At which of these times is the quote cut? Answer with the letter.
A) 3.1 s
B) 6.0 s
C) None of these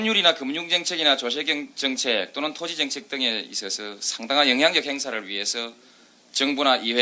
B